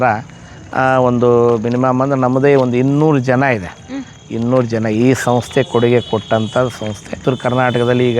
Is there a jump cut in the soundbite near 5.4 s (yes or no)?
no